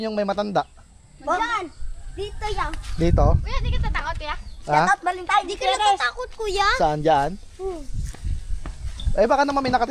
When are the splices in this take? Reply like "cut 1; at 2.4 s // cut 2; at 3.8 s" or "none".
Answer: none